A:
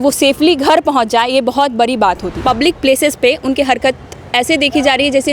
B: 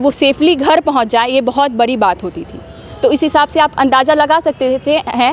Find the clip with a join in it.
A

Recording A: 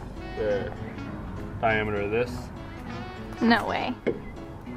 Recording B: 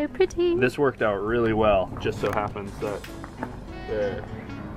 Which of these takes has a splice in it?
B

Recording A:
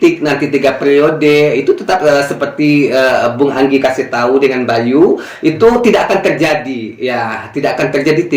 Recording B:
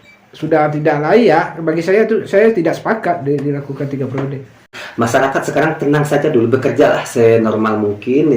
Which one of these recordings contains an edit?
B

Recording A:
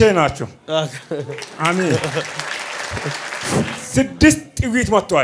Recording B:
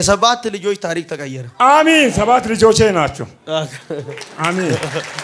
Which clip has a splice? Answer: A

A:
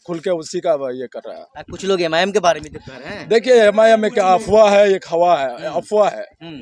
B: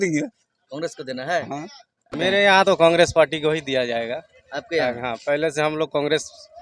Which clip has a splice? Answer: B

